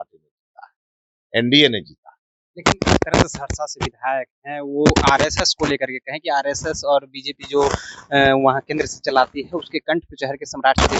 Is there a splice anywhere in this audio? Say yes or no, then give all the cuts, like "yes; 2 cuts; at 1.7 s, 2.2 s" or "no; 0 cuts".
no; 0 cuts